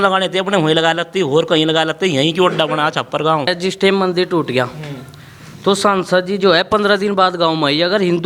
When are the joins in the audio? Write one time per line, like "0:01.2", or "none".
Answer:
0:03.5